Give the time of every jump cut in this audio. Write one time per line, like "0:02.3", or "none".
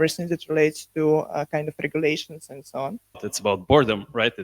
0:03.3